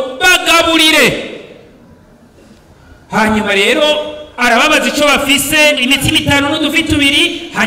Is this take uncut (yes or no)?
no